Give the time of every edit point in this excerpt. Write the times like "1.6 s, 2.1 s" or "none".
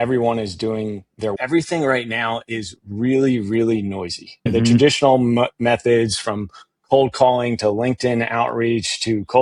1.4 s